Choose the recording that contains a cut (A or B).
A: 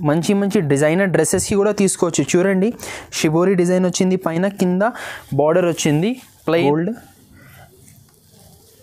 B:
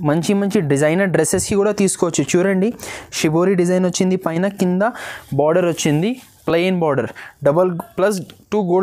A